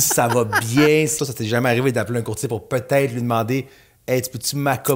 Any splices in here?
yes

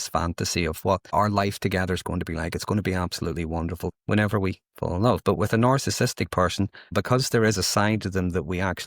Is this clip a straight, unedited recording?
no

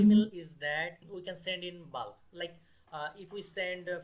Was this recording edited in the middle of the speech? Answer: yes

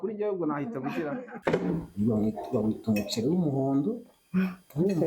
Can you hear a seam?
yes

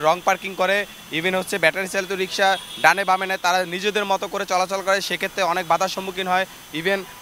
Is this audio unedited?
yes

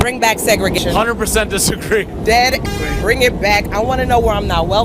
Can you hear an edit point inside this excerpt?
yes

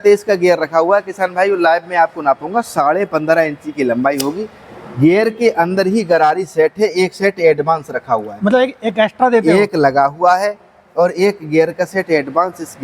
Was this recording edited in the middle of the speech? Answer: no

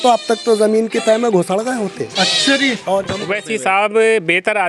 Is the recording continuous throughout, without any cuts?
no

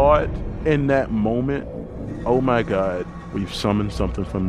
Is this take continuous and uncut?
yes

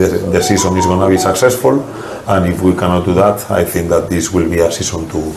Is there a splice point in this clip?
no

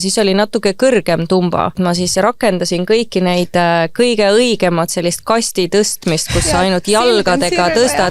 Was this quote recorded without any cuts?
no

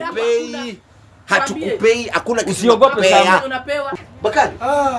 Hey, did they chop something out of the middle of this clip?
yes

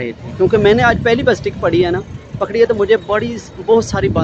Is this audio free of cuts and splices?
yes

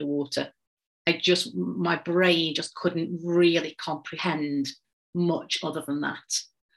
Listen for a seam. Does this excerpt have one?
no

